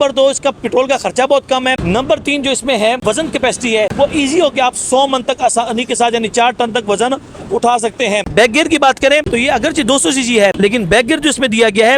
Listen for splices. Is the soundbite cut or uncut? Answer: cut